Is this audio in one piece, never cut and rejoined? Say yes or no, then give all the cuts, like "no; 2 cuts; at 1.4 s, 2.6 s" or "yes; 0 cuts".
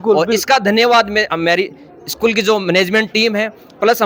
yes; 0 cuts